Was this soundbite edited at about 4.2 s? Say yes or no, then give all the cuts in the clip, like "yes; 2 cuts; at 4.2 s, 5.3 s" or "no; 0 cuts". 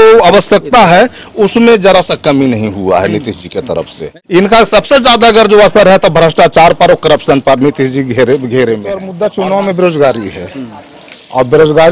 yes; 2 cuts; at 4.2 s, 9.1 s